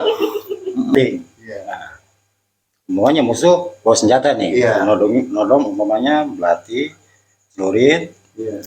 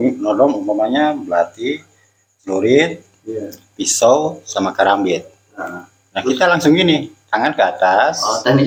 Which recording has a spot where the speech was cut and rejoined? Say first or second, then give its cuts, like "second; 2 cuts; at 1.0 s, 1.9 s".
first; 1 cut; at 0.9 s